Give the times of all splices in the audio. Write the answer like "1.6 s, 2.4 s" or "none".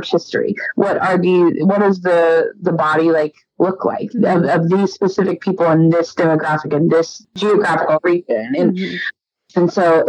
7.3 s, 9.1 s